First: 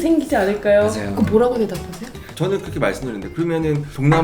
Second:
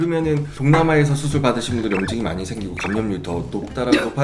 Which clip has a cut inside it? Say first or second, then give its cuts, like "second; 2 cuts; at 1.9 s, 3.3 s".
first; 1 cut; at 2.3 s